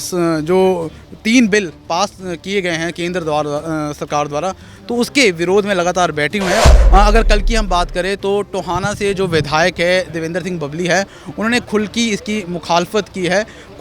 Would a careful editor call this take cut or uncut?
cut